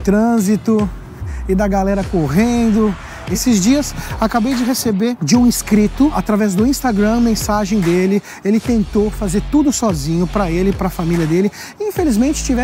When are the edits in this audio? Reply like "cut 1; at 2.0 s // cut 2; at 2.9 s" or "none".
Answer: cut 1; at 3.3 s